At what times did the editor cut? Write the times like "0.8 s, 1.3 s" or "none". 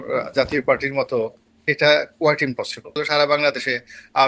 3.0 s